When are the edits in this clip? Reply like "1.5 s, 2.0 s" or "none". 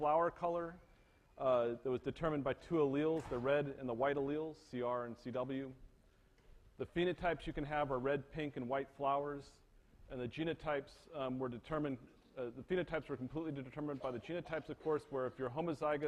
11.6 s